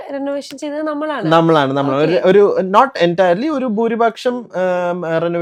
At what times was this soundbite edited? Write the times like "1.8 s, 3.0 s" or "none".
none

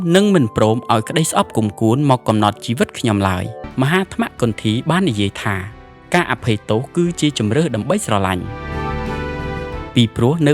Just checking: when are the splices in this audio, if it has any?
3.6 s

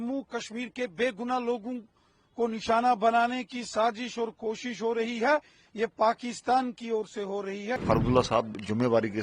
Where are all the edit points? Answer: 7.8 s

